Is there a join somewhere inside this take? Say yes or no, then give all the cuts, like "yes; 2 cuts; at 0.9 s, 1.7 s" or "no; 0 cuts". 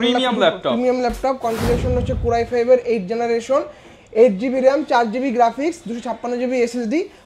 no; 0 cuts